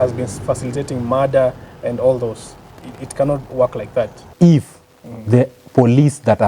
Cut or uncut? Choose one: cut